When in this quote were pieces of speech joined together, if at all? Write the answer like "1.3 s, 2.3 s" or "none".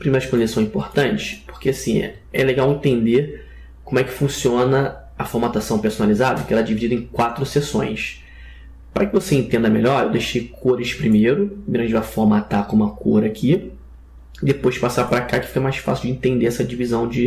8.0 s